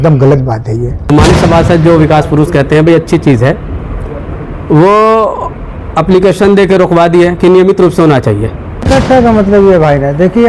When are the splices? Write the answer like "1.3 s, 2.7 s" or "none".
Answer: 1.0 s, 8.9 s